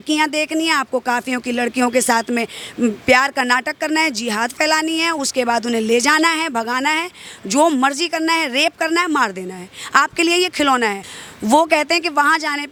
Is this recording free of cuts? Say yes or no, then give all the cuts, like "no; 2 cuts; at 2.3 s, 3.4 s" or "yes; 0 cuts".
yes; 0 cuts